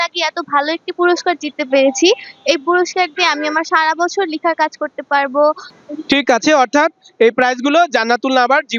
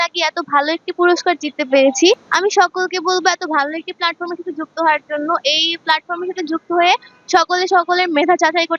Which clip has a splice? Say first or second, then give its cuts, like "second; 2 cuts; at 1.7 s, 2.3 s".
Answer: second; 1 cut; at 2.3 s